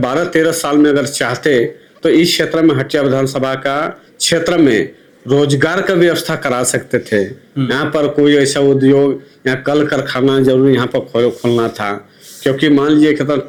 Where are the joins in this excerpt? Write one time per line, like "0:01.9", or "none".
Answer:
none